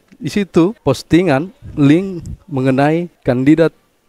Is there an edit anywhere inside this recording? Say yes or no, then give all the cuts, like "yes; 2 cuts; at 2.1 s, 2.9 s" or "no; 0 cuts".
yes; 2 cuts; at 0.8 s, 3.1 s